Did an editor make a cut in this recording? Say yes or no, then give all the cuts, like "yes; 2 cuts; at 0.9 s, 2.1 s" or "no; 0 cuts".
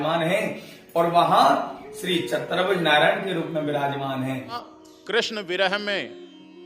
yes; 1 cut; at 4.6 s